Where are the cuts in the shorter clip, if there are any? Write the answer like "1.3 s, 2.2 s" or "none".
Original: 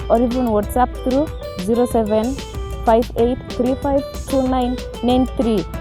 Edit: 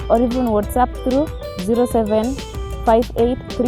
none